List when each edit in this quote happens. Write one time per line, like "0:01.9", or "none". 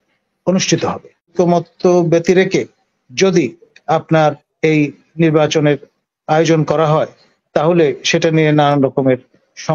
0:01.3